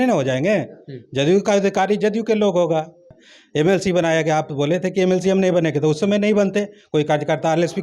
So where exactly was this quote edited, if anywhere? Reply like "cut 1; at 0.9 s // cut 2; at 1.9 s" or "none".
cut 1; at 3.2 s

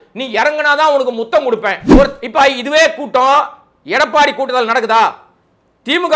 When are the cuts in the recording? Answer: cut 1; at 1.8 s

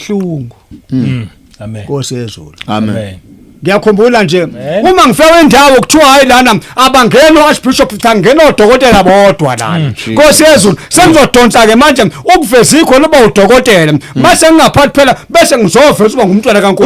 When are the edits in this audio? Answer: cut 1; at 4.7 s

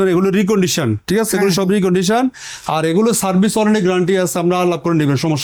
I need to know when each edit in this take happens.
none

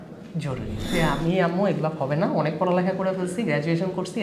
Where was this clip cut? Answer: cut 1; at 0.9 s

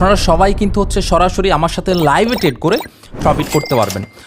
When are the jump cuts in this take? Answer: none

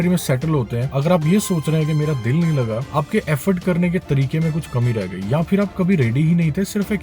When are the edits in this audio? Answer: cut 1; at 0.9 s // cut 2; at 2.9 s

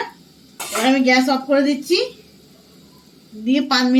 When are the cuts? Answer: none

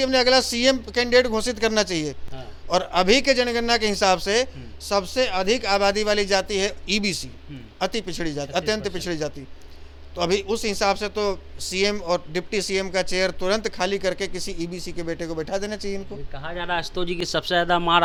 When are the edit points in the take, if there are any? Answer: none

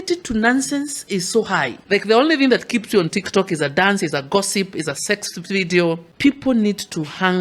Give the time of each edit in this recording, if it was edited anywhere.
cut 1; at 1.8 s // cut 2; at 6.1 s

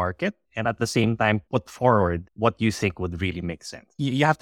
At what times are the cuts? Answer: cut 1; at 1.4 s // cut 2; at 2.3 s

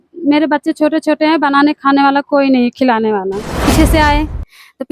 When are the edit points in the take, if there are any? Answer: cut 1; at 3.7 s

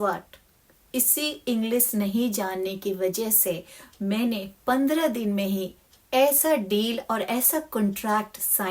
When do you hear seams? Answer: none

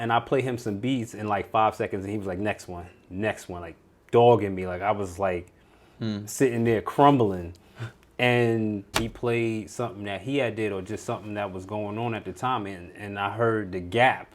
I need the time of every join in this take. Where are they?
cut 1; at 8.9 s

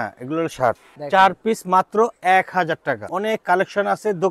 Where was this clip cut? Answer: cut 1; at 0.9 s // cut 2; at 3.1 s

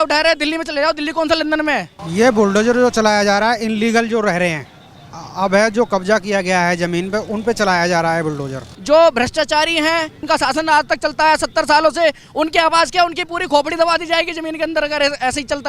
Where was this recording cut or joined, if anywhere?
cut 1; at 1.9 s // cut 2; at 8.7 s // cut 3; at 10.2 s

